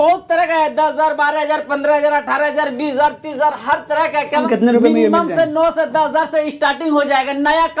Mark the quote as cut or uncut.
cut